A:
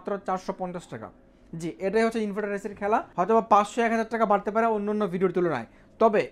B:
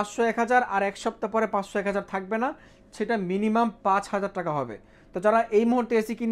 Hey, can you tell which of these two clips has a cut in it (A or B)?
A